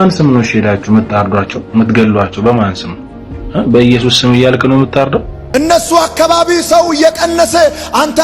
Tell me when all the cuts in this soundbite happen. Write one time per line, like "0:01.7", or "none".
0:05.4